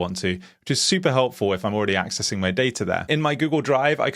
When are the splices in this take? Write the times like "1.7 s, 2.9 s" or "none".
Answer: 3.0 s